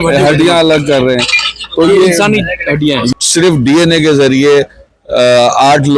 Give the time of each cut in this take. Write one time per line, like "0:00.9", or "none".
0:03.1